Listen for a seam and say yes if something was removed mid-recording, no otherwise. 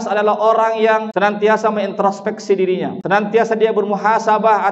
yes